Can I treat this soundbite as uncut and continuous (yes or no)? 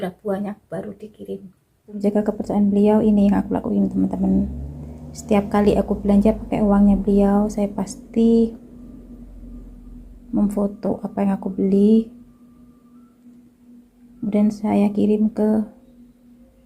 no